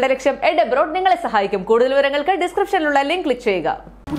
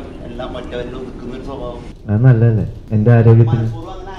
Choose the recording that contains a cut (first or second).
second